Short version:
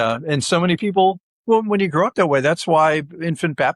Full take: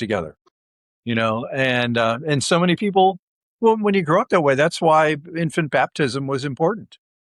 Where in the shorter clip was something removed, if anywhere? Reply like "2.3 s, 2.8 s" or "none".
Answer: 1.3 s